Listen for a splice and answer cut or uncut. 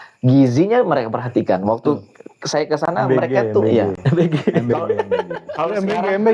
uncut